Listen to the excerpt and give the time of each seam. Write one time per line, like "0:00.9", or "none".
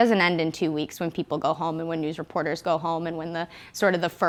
none